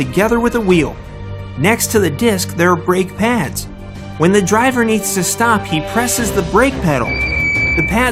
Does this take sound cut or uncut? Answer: uncut